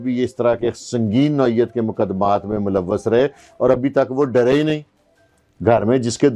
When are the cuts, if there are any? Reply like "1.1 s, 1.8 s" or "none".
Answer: none